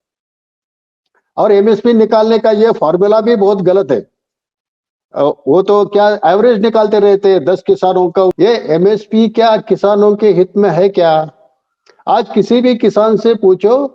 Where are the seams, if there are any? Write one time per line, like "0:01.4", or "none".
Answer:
0:08.3